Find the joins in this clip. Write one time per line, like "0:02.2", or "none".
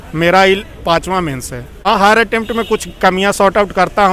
0:01.7